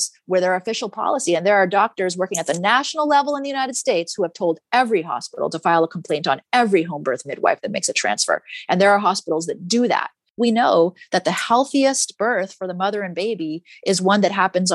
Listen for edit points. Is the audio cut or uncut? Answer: cut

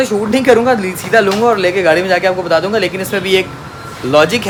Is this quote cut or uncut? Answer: uncut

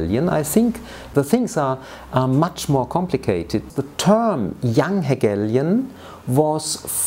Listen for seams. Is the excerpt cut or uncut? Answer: cut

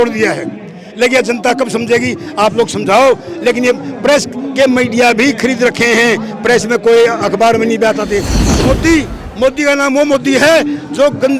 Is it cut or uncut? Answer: cut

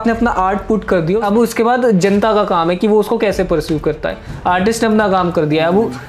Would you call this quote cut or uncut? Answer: cut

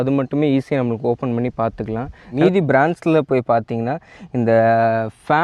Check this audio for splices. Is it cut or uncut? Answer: cut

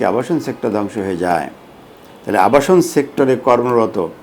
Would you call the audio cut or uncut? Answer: uncut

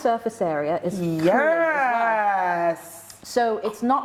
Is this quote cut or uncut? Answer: uncut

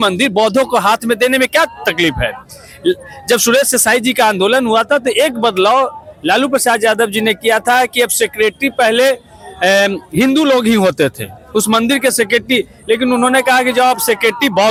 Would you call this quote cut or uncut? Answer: uncut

